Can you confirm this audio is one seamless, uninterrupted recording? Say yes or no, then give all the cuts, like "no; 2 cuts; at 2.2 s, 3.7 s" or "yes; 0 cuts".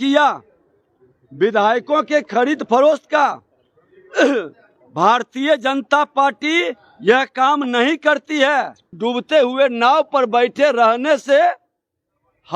no; 1 cut; at 8.9 s